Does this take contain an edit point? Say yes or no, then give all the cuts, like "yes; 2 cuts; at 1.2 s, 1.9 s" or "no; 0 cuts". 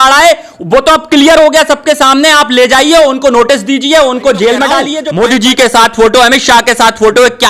yes; 1 cut; at 5.0 s